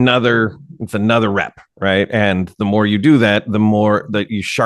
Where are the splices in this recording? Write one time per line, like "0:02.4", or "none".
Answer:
none